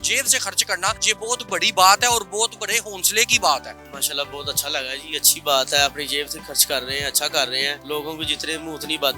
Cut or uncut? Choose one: cut